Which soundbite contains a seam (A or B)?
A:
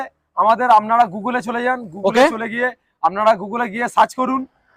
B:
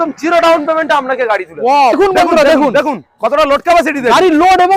B